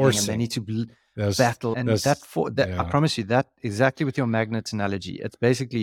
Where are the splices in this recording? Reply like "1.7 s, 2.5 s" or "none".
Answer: none